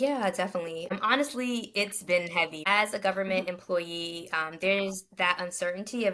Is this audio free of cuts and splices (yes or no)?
no